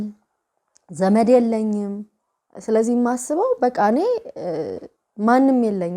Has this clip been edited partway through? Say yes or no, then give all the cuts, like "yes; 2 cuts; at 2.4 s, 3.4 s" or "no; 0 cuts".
no; 0 cuts